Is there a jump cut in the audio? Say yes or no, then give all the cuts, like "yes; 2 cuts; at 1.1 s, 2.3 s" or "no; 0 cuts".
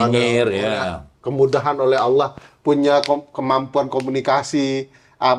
no; 0 cuts